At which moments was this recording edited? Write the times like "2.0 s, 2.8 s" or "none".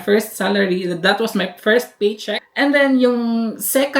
2.4 s